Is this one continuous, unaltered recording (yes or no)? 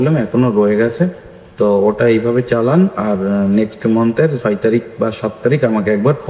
yes